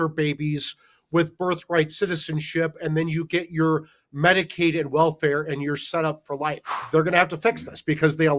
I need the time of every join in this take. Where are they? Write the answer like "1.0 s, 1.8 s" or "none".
6.8 s